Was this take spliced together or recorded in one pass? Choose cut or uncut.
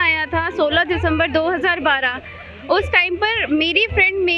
uncut